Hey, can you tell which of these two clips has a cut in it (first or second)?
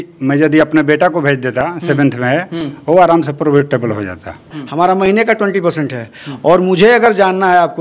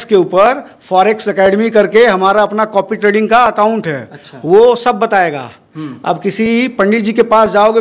first